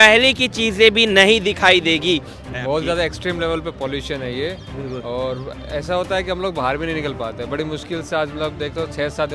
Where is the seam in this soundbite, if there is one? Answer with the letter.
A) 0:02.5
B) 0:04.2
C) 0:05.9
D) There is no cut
A